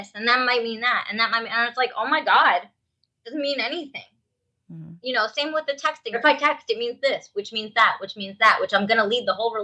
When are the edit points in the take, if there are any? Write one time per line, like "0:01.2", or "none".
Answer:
0:06.2